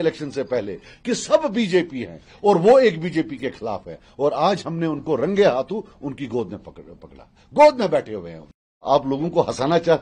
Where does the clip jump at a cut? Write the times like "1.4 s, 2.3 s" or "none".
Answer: 8.8 s